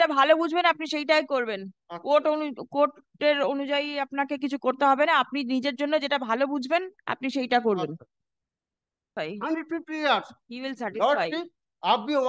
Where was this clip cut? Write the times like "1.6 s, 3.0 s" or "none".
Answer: 9.0 s